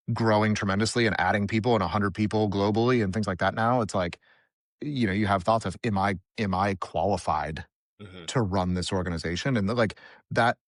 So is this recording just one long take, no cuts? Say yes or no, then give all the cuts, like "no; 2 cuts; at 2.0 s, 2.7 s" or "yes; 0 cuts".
yes; 0 cuts